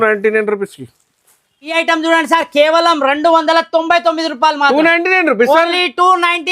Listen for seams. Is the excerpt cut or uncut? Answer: cut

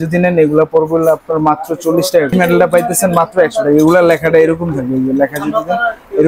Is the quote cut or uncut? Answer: cut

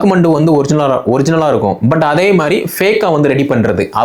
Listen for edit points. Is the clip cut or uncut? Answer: uncut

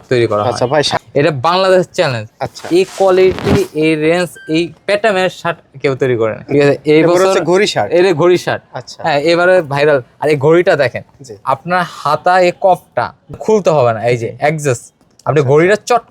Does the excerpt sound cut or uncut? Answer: cut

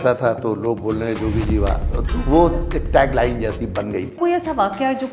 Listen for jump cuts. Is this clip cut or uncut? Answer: cut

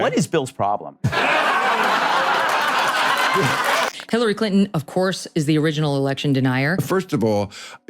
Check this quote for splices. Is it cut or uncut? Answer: cut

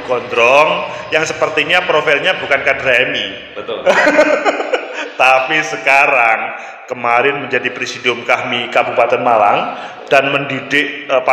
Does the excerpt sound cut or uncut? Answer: uncut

